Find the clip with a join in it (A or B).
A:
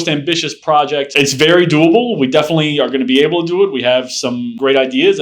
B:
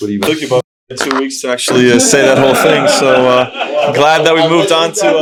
A